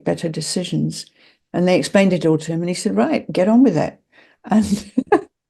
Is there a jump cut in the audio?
no; 0 cuts

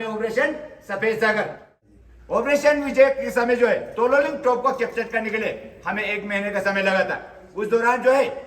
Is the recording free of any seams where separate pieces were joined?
no; 1 cut; at 1.7 s

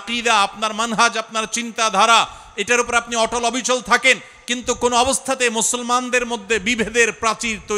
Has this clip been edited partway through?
no; 0 cuts

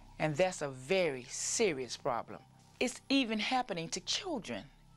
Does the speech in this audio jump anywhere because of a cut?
yes; 1 cut; at 2.6 s

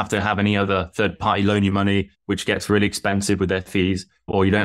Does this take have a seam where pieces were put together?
yes; 1 cut; at 2.2 s

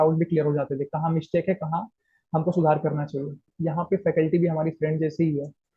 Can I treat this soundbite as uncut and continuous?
no; 1 cut; at 3.5 s

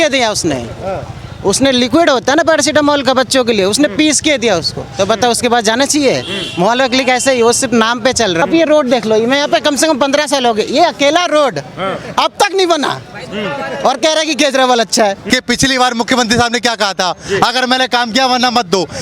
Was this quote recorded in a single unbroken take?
no; 2 cuts; at 8.4 s, 15.2 s

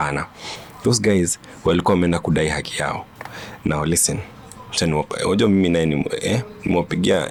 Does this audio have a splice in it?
no; 0 cuts

